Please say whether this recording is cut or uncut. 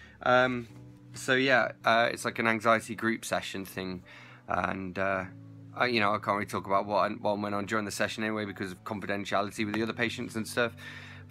uncut